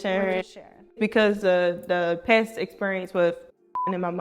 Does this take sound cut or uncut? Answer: cut